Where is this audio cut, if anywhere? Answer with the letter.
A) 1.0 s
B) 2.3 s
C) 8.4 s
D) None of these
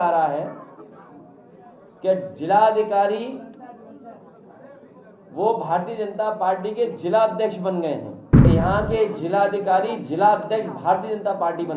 C